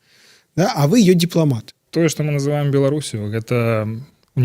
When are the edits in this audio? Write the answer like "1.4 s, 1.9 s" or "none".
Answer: 1.8 s